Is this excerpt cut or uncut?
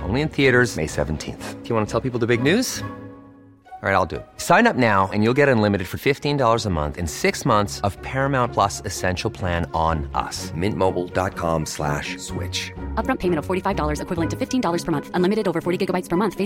uncut